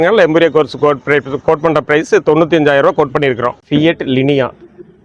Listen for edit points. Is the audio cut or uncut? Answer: cut